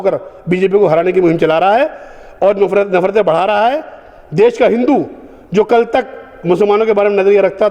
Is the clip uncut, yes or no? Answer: yes